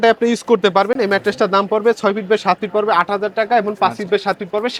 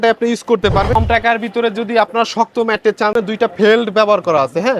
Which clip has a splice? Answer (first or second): second